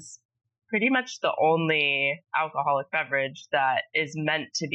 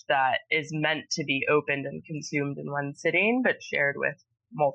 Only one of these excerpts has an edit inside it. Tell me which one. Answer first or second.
first